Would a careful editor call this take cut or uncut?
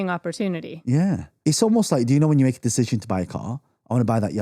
cut